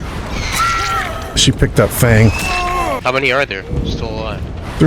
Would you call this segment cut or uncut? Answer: cut